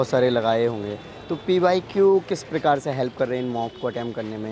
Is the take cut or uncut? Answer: uncut